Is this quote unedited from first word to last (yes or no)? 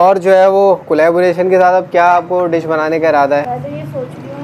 no